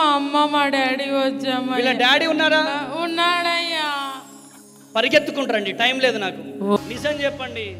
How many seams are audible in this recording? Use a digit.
1